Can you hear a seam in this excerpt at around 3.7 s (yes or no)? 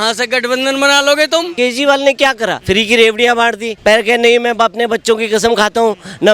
yes